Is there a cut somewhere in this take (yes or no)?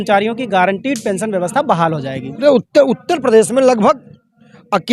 yes